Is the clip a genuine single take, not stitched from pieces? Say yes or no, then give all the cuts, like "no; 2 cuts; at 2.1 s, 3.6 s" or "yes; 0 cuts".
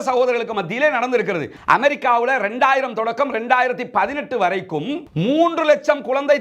no; 1 cut; at 1.5 s